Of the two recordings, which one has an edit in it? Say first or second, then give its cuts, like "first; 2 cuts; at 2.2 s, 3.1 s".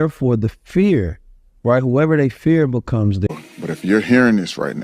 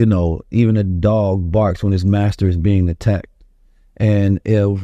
first; 1 cut; at 3.3 s